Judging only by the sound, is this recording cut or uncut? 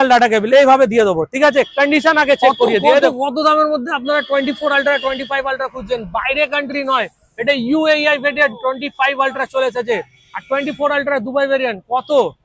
cut